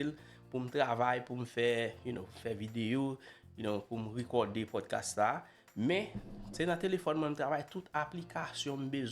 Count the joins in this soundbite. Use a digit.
0